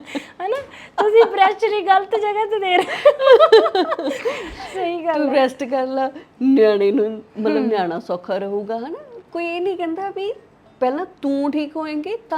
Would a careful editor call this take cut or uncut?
cut